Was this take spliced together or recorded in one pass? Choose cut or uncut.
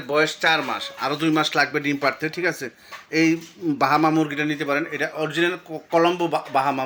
uncut